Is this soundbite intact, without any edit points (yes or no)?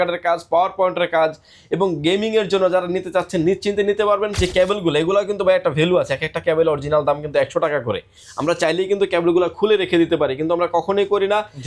no